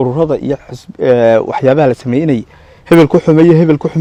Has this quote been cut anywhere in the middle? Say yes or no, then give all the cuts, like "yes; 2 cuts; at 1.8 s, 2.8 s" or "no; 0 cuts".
no; 0 cuts